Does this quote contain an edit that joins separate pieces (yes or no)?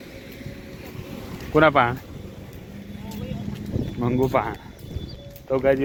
no